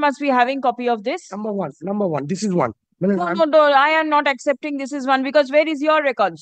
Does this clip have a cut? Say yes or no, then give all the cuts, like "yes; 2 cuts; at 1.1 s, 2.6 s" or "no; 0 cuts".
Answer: no; 0 cuts